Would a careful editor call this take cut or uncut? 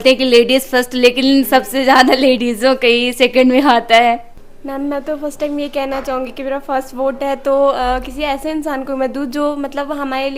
uncut